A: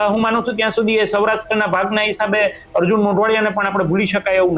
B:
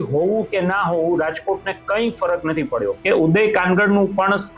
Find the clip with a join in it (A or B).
B